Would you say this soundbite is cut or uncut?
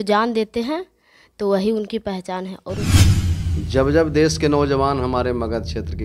cut